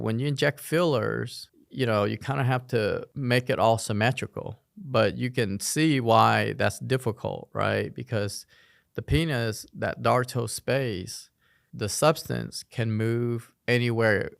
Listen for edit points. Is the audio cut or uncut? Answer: uncut